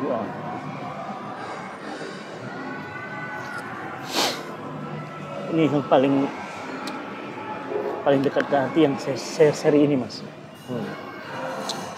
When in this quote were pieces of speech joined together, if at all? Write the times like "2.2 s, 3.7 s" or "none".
none